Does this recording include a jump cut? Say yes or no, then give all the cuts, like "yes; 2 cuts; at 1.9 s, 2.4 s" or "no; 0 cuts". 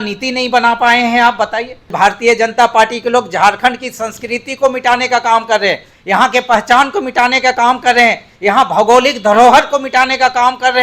yes; 1 cut; at 1.9 s